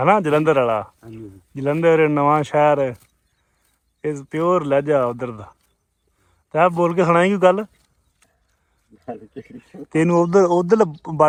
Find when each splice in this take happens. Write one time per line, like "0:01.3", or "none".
none